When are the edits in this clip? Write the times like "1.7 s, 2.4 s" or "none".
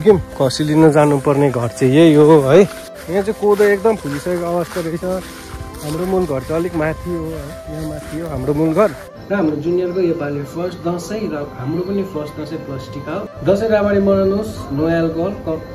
3.0 s, 9.0 s, 13.3 s